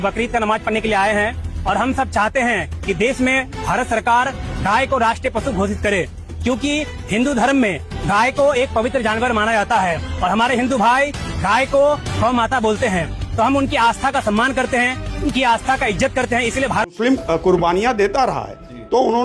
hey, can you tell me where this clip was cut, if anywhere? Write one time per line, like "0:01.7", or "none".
0:16.9